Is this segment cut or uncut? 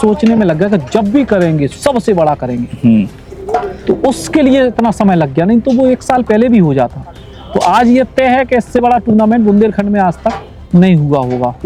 uncut